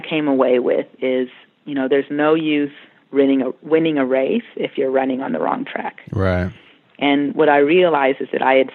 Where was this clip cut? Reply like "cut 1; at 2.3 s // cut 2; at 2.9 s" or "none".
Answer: none